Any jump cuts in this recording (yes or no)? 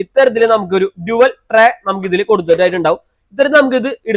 no